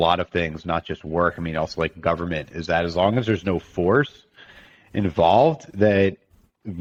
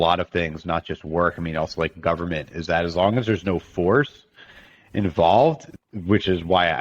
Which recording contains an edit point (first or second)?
second